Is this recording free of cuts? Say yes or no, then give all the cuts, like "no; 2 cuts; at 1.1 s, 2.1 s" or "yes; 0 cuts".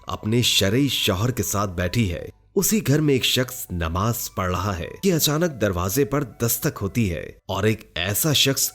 no; 1 cut; at 4.9 s